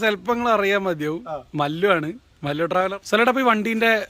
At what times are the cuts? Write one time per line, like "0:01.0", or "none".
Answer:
0:02.9